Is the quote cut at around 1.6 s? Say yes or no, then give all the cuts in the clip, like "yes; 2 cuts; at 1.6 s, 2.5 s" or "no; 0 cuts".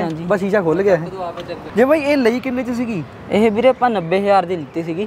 yes; 1 cut; at 1.6 s